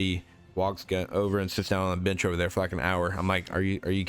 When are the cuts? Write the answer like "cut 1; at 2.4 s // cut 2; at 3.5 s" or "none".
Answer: none